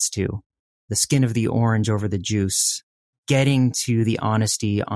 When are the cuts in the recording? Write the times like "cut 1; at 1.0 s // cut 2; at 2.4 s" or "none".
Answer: none